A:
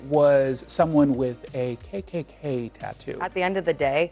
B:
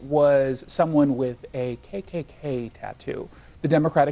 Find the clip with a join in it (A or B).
A